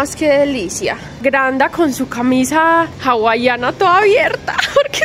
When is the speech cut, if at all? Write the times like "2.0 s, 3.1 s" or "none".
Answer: 1.2 s, 3.0 s

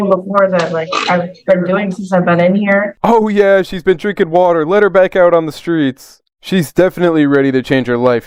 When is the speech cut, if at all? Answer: none

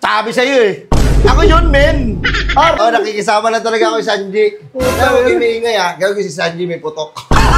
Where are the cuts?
2.8 s

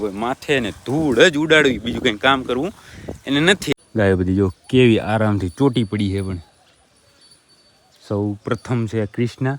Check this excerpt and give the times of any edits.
3.7 s

